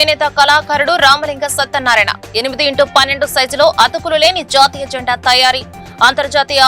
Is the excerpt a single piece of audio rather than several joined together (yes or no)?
yes